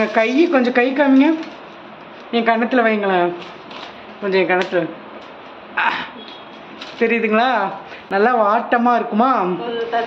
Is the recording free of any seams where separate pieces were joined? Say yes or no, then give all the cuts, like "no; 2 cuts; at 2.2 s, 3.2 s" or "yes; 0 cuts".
yes; 0 cuts